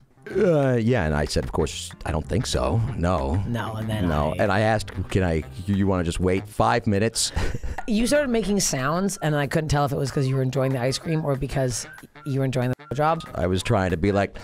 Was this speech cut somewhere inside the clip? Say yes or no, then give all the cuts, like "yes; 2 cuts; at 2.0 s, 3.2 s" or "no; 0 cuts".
yes; 2 cuts; at 7.8 s, 13.2 s